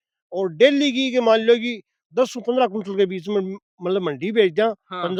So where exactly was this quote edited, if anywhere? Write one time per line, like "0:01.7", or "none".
none